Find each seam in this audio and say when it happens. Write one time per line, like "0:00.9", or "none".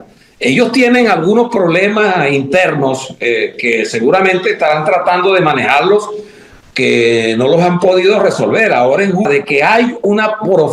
0:09.3